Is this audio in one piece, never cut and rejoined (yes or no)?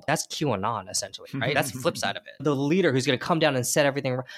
no